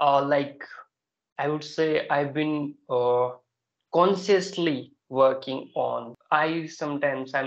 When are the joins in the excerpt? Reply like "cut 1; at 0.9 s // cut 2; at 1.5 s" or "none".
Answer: cut 1; at 6.1 s